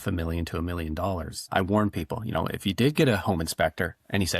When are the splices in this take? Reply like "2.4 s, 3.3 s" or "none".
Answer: 1.5 s